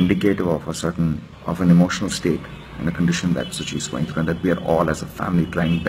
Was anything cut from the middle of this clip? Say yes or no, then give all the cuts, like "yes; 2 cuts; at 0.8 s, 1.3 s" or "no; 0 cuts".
yes; 1 cut; at 1.3 s